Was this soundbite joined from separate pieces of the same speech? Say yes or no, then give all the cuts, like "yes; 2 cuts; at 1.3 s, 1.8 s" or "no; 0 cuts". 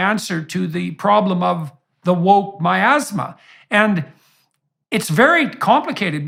no; 0 cuts